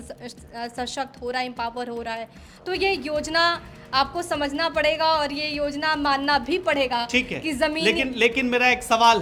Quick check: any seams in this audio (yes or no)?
no